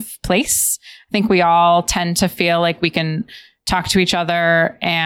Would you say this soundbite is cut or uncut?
uncut